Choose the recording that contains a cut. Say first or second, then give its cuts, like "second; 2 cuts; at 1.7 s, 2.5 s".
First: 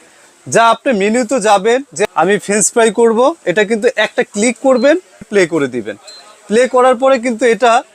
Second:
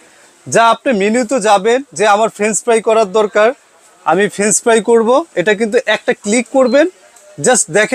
first; 2 cuts; at 1.9 s, 5.2 s